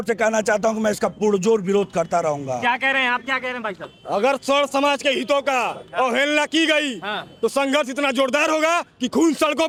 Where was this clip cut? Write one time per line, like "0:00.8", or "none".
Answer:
none